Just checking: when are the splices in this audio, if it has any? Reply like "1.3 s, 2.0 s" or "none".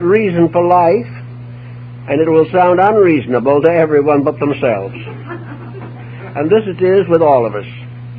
6.7 s